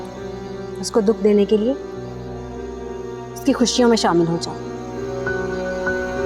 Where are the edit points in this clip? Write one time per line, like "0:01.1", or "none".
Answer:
none